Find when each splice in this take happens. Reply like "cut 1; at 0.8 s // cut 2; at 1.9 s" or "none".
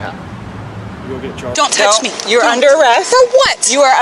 cut 1; at 1.5 s